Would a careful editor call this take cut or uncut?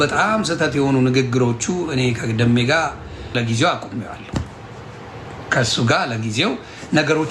cut